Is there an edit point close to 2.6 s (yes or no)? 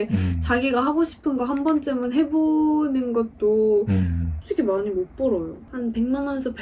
no